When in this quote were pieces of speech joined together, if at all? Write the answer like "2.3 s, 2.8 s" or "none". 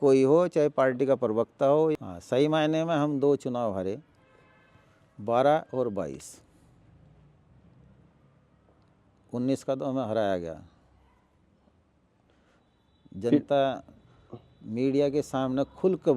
1.9 s